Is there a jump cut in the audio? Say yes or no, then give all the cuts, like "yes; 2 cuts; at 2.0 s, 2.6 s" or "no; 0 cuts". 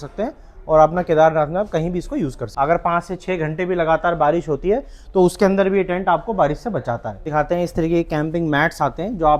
yes; 2 cuts; at 2.4 s, 7.3 s